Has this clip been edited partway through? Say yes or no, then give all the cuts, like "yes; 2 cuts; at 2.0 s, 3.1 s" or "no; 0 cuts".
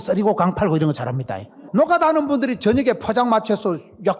yes; 1 cut; at 1.6 s